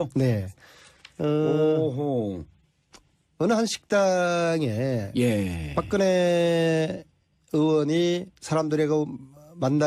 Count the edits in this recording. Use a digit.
1